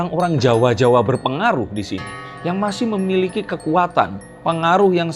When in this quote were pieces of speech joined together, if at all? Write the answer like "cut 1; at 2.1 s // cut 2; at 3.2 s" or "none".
none

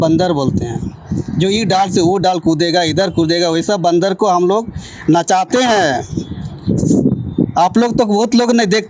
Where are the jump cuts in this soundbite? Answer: none

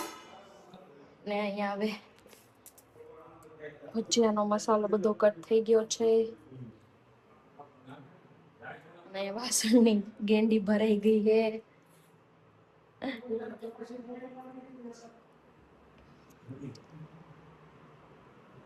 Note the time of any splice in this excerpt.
none

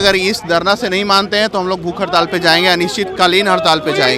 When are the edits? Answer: none

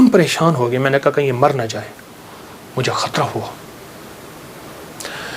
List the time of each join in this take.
none

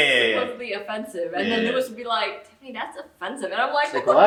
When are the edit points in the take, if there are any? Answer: none

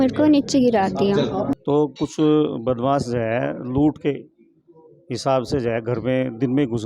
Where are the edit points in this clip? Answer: cut 1; at 1.3 s

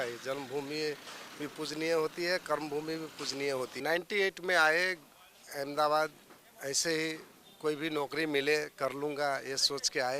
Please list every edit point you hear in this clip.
cut 1; at 3.7 s

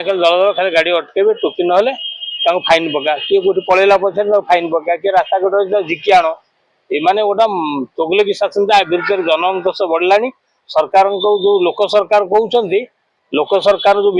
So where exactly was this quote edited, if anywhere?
none

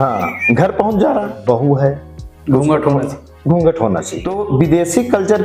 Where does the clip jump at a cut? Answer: cut 1; at 1.3 s // cut 2; at 4.4 s

